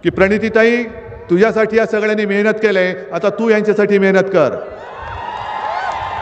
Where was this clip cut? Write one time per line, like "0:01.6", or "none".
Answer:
none